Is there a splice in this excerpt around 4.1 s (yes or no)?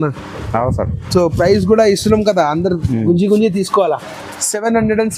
no